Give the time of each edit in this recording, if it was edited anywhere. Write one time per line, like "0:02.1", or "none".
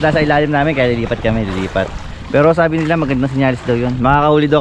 none